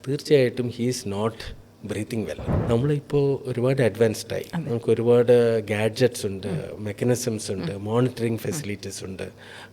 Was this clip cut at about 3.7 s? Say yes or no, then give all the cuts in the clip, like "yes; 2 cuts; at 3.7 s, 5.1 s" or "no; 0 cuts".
no; 1 cut; at 2.5 s